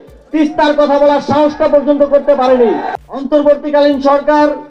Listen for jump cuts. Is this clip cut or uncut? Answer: cut